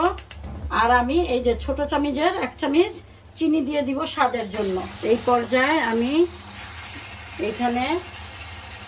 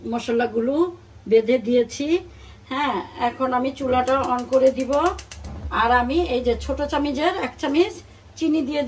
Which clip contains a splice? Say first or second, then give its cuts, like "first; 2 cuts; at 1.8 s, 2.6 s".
first; 1 cut; at 4.9 s